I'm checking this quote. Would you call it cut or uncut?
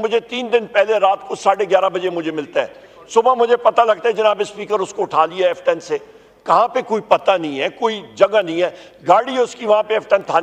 uncut